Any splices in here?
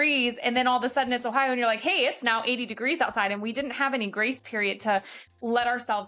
no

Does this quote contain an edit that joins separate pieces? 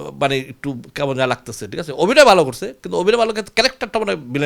no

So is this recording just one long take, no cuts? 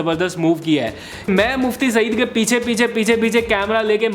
no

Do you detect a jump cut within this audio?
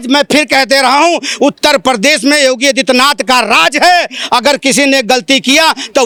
no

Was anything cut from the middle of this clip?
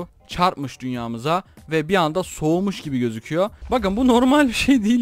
yes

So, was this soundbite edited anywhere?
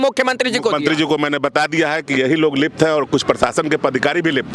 no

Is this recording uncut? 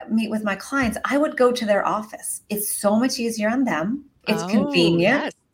no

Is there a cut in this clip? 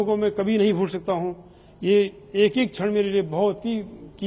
no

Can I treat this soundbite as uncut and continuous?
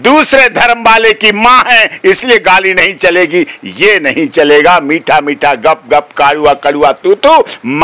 yes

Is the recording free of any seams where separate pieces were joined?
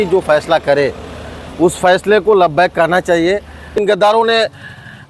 no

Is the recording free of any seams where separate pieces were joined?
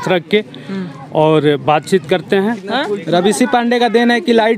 no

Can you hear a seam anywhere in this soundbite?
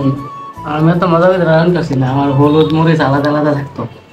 no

